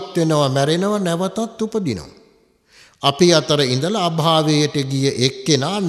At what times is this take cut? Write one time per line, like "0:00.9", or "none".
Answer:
none